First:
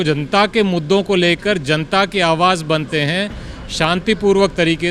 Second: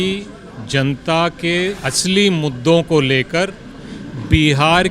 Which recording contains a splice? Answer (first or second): second